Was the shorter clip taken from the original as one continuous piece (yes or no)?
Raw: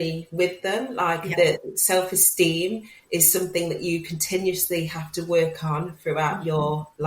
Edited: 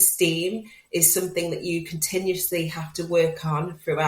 yes